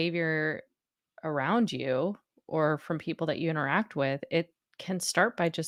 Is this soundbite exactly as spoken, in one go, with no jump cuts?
yes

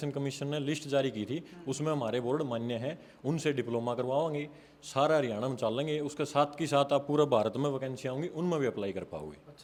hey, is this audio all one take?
yes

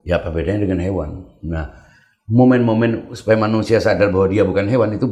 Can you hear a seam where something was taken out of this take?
no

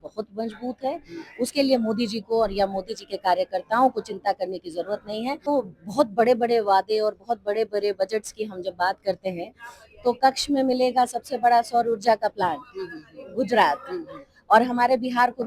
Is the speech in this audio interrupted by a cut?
yes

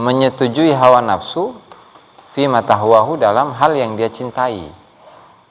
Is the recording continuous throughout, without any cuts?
yes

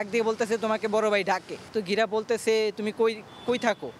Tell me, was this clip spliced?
no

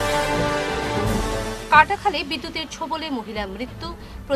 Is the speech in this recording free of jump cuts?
no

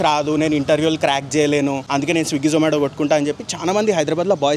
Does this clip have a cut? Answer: yes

